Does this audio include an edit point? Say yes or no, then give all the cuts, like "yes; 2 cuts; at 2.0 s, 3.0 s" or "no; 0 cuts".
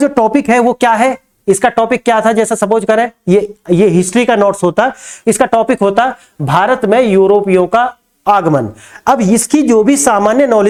no; 0 cuts